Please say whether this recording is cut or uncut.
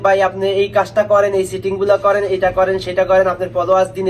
uncut